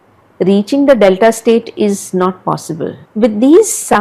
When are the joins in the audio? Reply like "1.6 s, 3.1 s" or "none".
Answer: 3.0 s